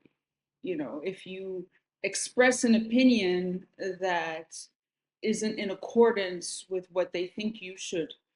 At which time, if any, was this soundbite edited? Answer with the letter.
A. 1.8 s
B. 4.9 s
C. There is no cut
A